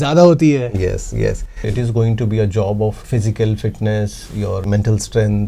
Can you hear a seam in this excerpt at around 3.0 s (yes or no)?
yes